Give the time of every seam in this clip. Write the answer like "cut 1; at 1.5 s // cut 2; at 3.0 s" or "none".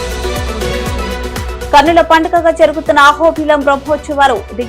cut 1; at 1.7 s

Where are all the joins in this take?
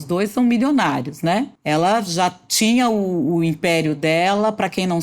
cut 1; at 1.5 s

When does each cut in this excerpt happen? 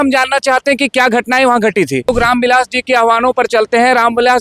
cut 1; at 2.1 s

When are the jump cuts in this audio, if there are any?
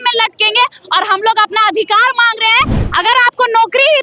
cut 1; at 2.8 s

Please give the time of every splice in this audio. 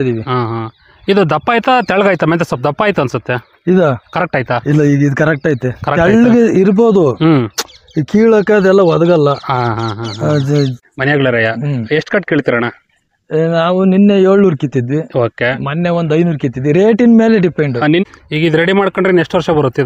cut 1; at 10.8 s // cut 2; at 18.0 s

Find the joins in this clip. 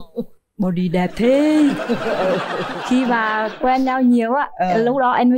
none

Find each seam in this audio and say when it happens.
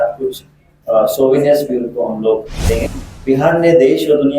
cut 1; at 2.8 s

